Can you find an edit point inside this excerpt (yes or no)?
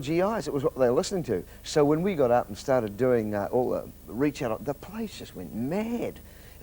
yes